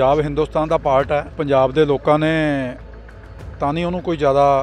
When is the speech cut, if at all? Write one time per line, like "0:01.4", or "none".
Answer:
0:01.3